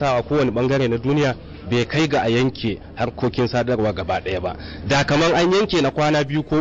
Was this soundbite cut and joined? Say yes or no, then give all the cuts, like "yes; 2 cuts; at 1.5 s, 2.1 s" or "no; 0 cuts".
no; 0 cuts